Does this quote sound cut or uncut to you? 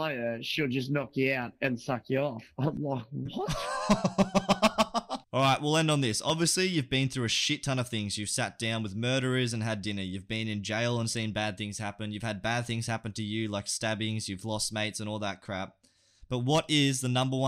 cut